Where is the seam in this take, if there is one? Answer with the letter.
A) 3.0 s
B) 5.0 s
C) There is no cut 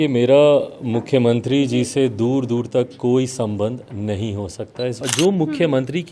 B